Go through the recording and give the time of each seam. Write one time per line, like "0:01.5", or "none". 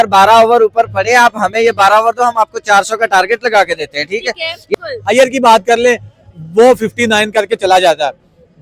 0:04.6